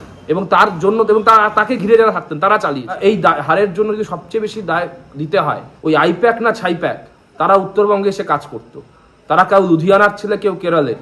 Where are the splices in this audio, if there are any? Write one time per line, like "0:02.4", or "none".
0:02.9
0:05.7